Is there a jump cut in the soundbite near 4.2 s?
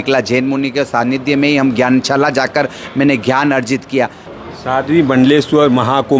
yes; 1 cut; at 4.2 s

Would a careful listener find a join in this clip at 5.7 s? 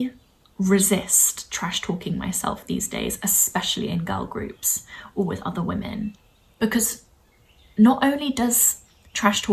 no; 0 cuts

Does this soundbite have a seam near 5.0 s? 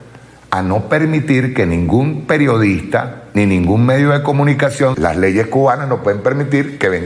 yes; 1 cut; at 5.0 s

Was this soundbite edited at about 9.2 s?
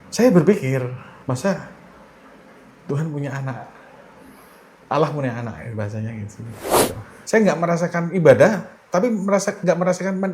no; 2 cuts; at 1.1 s, 6.8 s

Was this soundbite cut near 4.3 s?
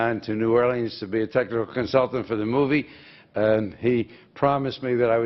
no; 1 cut; at 2.9 s

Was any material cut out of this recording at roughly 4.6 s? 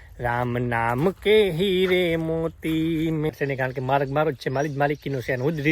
no; 1 cut; at 3.3 s

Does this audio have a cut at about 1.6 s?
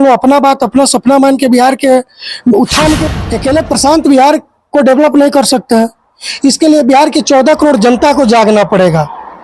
no; 1 cut; at 3.0 s

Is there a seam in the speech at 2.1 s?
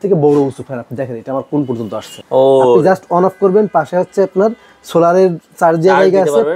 yes; 1 cut; at 2.1 s

